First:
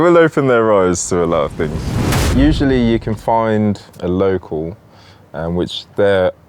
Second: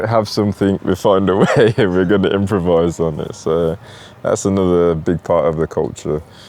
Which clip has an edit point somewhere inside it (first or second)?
first